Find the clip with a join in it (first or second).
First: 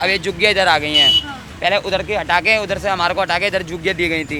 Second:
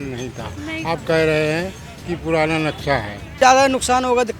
second